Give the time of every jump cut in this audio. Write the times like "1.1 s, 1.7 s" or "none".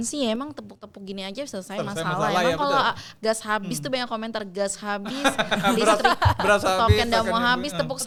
none